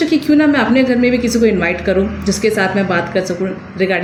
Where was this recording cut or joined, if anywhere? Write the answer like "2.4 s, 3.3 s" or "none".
none